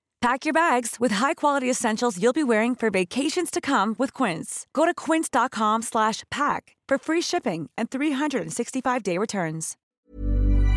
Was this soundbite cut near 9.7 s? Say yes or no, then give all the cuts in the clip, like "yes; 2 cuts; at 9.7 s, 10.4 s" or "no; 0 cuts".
yes; 1 cut; at 9.7 s